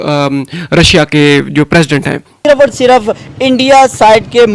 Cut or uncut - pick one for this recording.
cut